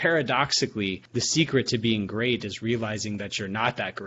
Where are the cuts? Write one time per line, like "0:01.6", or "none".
0:01.0